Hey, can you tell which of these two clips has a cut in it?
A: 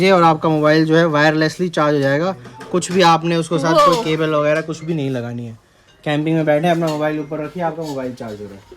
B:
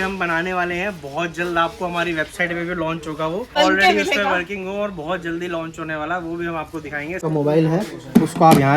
B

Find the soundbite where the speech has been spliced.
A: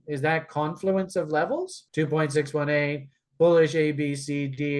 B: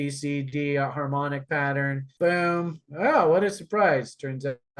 B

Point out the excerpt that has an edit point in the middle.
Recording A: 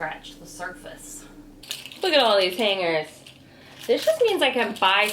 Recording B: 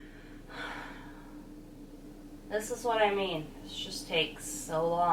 A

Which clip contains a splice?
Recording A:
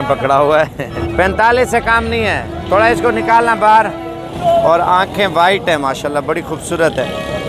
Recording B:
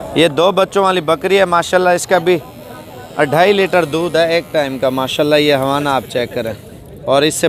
A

